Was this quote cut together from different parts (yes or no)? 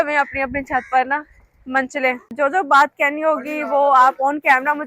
yes